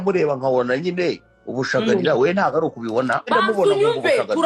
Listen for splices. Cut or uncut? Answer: cut